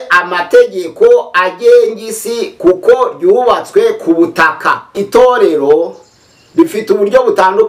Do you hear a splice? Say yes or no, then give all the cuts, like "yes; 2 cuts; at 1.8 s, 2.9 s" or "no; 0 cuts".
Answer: yes; 1 cut; at 5.0 s